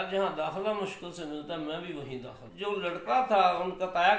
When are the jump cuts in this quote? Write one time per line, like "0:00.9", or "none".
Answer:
0:02.5